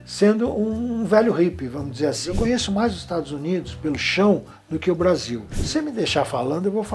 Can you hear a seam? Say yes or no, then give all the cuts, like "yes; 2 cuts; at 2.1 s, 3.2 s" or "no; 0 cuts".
yes; 2 cuts; at 2.3 s, 5.6 s